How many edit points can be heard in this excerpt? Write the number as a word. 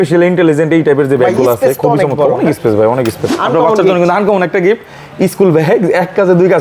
one